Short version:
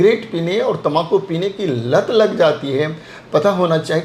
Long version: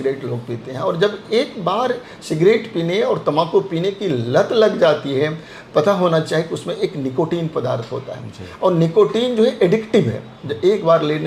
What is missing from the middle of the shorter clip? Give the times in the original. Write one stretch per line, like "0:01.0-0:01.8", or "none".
none